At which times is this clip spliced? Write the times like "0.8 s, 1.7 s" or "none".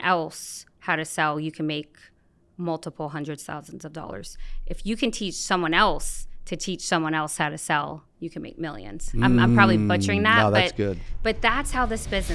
none